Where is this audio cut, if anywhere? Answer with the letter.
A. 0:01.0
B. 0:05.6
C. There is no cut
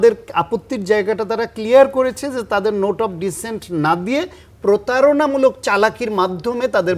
C